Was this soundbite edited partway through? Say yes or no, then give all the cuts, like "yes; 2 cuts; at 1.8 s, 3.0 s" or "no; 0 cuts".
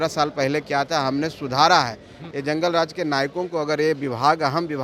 yes; 1 cut; at 2.2 s